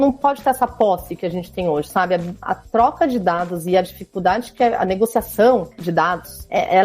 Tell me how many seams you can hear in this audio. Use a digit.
1